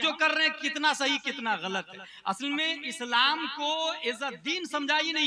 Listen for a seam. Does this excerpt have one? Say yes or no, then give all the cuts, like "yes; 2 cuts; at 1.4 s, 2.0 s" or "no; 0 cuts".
no; 0 cuts